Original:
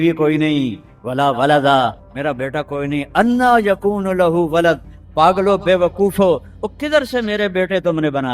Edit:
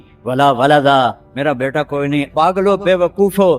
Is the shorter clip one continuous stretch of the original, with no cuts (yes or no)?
no